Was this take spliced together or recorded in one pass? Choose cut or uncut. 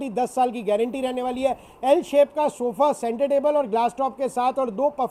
uncut